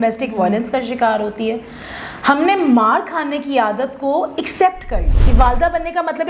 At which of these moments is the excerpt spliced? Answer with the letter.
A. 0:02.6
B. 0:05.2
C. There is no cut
B